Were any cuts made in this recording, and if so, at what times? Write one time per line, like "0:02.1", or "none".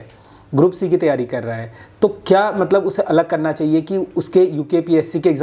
none